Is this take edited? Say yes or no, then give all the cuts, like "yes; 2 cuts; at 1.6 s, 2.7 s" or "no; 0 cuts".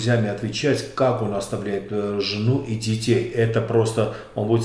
no; 0 cuts